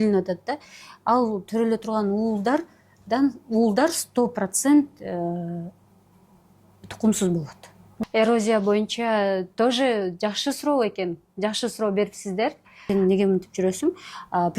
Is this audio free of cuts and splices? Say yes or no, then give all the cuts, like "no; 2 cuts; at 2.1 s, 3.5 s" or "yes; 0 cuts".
no; 2 cuts; at 7.9 s, 12.8 s